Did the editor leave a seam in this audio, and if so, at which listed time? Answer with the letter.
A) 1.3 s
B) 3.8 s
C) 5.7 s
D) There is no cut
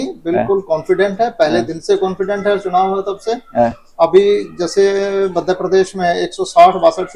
D